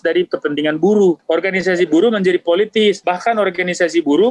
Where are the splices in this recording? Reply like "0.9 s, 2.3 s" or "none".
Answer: 1.2 s, 3.0 s